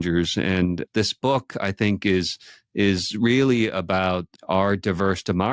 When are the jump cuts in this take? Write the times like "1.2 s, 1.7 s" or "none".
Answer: 0.8 s, 4.3 s